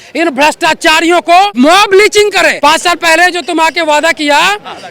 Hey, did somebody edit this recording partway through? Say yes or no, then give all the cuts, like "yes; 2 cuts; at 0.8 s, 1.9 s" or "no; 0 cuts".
yes; 2 cuts; at 1.5 s, 2.6 s